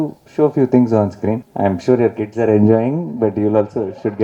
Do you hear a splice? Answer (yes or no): yes